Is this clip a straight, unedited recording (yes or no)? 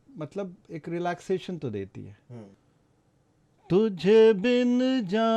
no